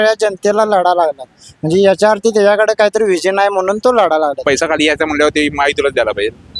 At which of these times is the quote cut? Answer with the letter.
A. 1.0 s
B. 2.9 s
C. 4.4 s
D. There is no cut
C